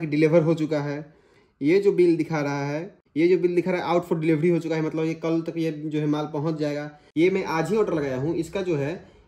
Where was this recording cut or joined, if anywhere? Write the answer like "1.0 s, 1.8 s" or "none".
none